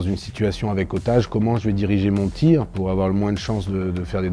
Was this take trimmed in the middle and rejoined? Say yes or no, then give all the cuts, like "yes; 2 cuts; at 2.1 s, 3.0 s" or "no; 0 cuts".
no; 0 cuts